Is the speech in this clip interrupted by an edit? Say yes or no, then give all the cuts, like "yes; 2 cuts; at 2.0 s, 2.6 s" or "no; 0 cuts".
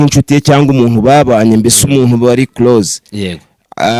no; 0 cuts